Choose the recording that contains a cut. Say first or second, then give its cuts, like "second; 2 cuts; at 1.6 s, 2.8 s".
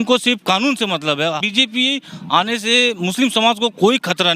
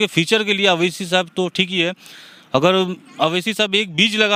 first; 1 cut; at 1.4 s